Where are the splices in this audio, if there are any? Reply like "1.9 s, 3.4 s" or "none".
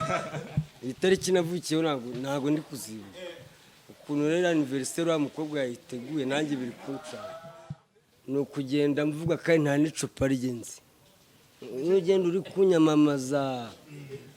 7.5 s